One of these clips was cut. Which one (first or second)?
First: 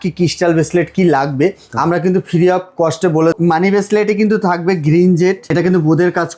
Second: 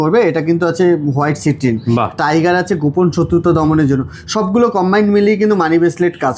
first